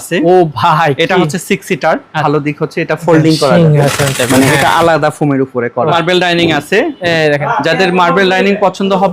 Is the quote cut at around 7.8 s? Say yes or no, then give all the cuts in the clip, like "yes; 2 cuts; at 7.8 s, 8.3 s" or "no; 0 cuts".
no; 2 cuts; at 2.2 s, 5.9 s